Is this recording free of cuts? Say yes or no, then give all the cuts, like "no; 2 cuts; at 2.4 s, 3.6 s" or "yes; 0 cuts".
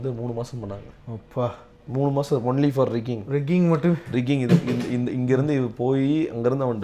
yes; 0 cuts